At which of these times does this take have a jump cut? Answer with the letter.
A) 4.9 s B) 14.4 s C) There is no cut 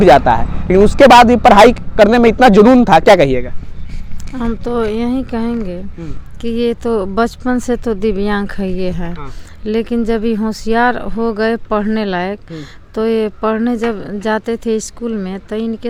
C